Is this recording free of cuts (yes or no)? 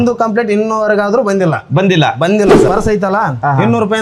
no